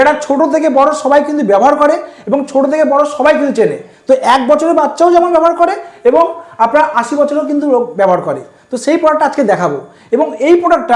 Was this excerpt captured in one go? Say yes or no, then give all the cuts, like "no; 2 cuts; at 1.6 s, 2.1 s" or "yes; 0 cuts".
yes; 0 cuts